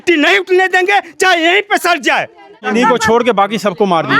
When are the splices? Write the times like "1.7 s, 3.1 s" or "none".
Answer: 2.6 s